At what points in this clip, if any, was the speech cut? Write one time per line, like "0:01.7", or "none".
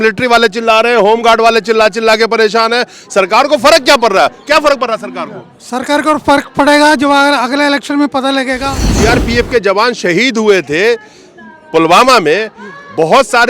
0:08.9